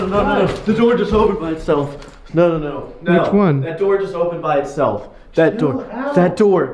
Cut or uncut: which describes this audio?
uncut